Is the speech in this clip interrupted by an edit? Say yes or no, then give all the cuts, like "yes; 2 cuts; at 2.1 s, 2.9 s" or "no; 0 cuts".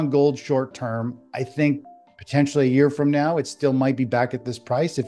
no; 0 cuts